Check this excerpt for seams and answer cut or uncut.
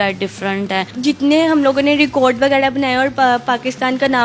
cut